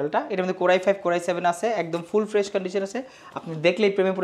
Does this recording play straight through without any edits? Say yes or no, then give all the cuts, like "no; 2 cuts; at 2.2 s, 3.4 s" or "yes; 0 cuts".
yes; 0 cuts